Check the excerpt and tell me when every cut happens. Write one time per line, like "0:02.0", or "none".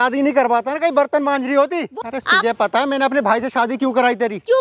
0:02.0